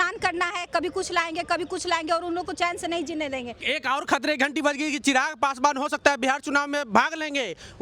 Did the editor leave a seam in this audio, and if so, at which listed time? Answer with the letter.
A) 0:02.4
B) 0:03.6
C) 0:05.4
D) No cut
B